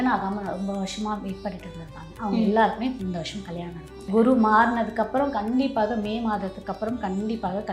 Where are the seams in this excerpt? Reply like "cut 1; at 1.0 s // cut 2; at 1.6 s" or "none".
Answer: cut 1; at 4.0 s